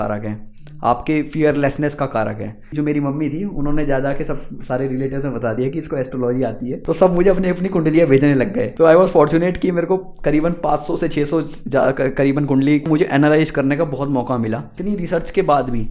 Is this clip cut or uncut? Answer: cut